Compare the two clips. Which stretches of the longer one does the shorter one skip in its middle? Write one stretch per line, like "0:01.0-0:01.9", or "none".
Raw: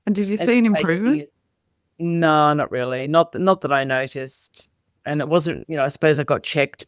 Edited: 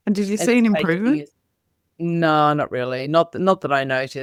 none